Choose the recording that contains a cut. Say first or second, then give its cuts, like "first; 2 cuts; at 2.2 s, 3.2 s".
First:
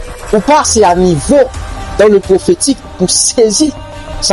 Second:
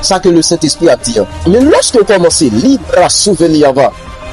second; 1 cut; at 1.4 s